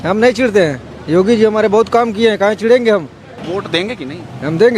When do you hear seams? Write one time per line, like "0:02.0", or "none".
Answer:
0:03.5

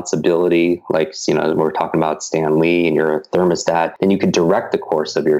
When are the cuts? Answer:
0:03.9

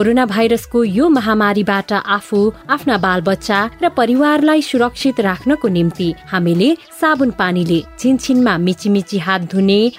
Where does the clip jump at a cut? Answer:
none

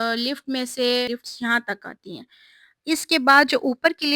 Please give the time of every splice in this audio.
0:01.1

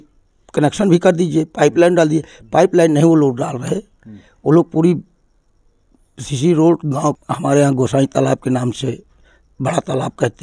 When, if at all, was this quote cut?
0:07.2

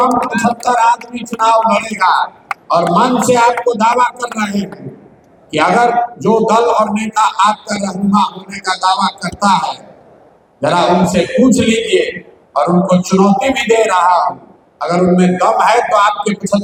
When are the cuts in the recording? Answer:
none

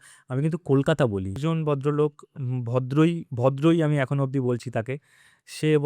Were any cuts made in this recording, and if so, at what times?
0:01.3

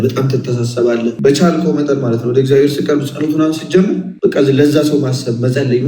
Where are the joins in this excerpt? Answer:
0:01.2
0:04.1

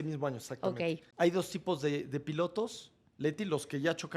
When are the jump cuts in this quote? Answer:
0:01.1

